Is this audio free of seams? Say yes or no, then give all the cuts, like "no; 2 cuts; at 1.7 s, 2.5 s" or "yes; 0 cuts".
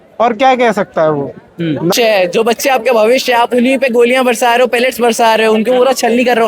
no; 1 cut; at 1.9 s